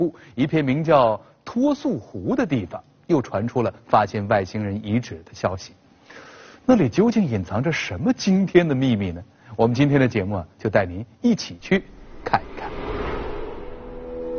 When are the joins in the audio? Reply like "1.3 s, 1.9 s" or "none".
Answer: none